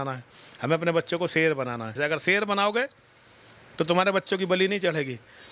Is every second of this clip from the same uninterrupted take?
no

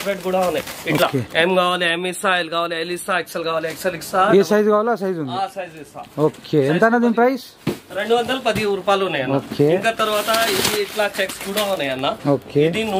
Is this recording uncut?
yes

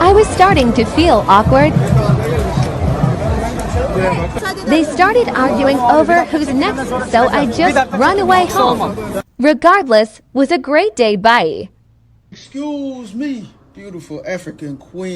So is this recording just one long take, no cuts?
no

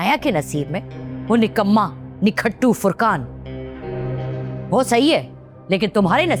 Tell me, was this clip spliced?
no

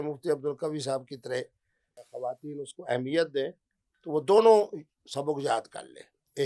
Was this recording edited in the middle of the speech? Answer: yes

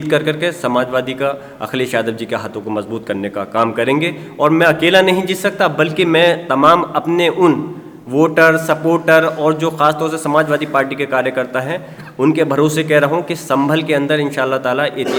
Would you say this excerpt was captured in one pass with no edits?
yes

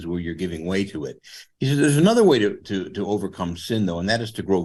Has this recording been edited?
no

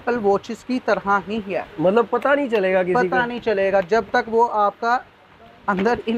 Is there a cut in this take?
no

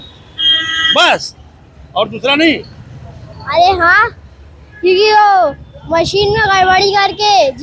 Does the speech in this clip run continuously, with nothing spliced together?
yes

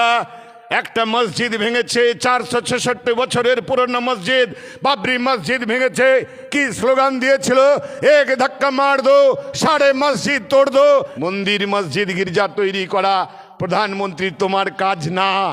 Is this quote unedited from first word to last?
no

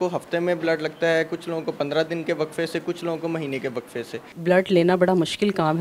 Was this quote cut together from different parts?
yes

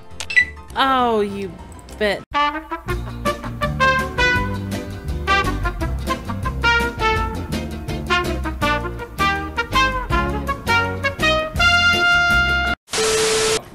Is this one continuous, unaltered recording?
no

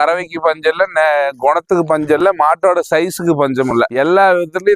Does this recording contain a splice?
no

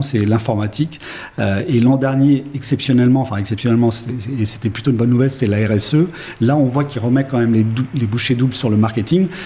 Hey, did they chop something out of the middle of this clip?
no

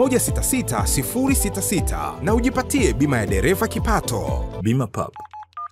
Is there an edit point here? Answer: yes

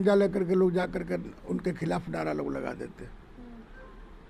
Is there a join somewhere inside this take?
no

